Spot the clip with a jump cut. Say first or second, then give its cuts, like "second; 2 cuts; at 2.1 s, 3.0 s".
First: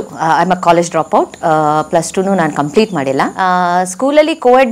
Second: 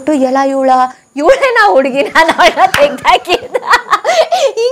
first; 1 cut; at 3.3 s